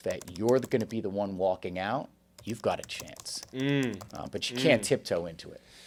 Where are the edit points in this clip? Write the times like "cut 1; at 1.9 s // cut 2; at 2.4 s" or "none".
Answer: none

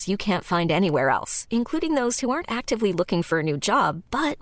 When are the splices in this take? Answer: none

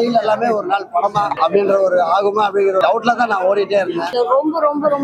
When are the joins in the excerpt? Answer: cut 1; at 1.3 s // cut 2; at 2.8 s // cut 3; at 4.1 s

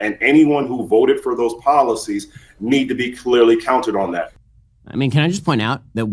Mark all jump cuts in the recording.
cut 1; at 4.3 s

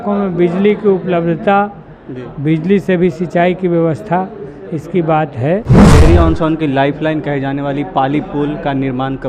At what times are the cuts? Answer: cut 1; at 5.9 s

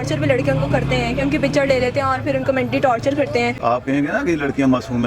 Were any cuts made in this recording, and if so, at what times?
cut 1; at 3.6 s

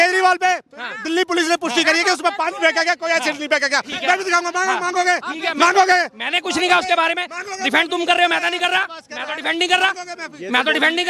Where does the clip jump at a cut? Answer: none

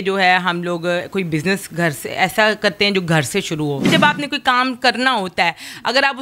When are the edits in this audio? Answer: cut 1; at 3.9 s

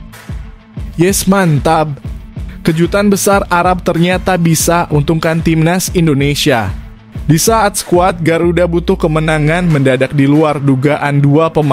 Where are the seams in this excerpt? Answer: cut 1; at 0.9 s

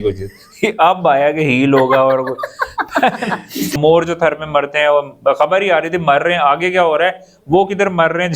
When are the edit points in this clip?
cut 1; at 3.7 s

